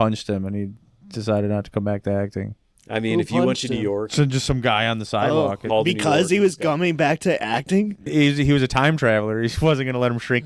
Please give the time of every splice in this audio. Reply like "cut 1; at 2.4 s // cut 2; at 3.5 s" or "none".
cut 1; at 5.6 s // cut 2; at 8.0 s